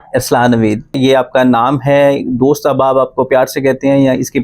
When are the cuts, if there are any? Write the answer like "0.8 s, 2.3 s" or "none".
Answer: 1.0 s